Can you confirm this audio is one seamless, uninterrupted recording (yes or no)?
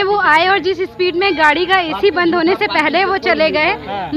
yes